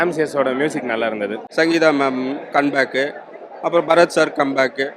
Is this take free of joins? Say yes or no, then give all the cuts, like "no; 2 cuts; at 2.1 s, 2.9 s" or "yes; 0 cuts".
no; 1 cut; at 1.4 s